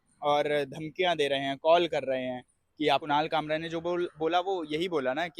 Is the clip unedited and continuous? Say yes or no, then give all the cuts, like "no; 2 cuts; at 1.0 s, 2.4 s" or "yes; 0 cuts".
no; 1 cut; at 3.0 s